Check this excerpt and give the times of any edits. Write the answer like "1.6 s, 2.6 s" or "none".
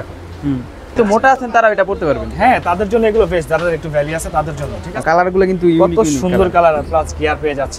0.9 s, 4.9 s